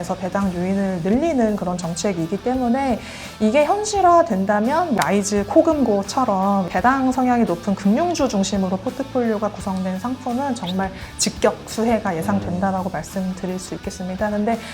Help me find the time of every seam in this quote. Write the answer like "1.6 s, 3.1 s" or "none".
5.0 s, 6.7 s